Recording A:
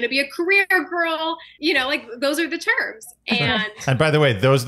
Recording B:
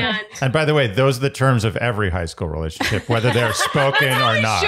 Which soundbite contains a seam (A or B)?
A